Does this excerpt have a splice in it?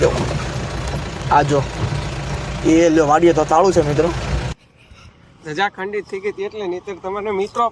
yes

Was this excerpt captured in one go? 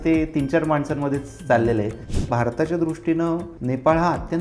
no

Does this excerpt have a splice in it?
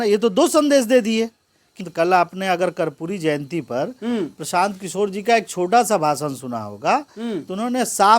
yes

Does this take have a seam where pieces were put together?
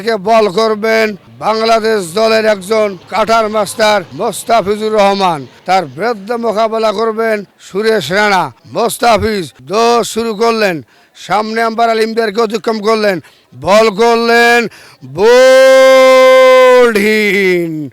yes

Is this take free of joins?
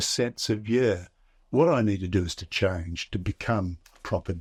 yes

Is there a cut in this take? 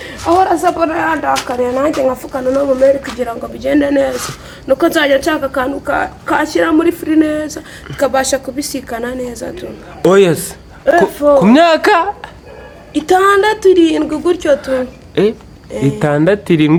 no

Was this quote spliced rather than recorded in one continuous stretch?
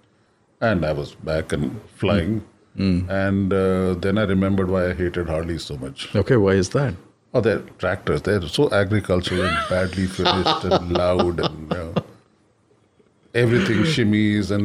no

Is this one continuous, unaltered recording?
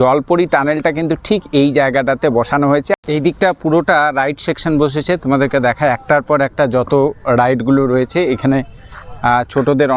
yes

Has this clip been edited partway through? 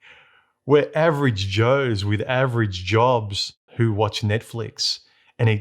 yes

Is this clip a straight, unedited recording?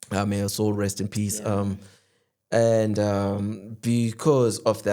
yes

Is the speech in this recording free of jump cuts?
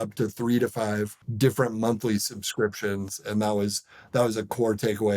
no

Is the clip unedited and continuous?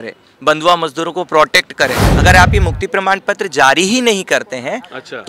no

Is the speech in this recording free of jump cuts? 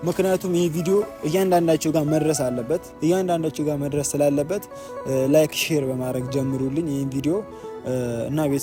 yes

